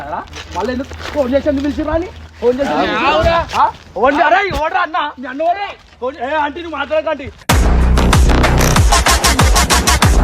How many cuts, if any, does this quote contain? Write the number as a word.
one